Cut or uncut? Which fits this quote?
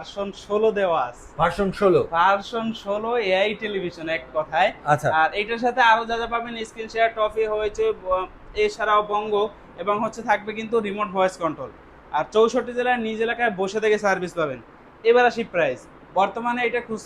uncut